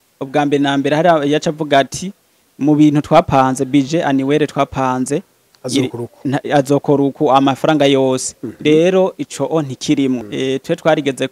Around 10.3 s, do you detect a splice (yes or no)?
yes